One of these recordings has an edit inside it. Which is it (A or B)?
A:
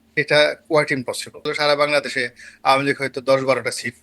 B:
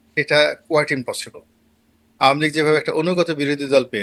A